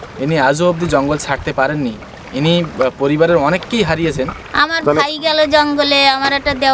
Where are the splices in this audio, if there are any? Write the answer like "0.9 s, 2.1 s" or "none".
4.4 s